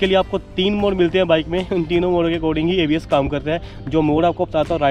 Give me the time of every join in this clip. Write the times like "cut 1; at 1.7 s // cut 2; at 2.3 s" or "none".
none